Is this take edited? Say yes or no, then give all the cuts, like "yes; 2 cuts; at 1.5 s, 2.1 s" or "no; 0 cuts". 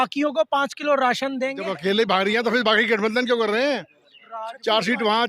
yes; 1 cut; at 1.6 s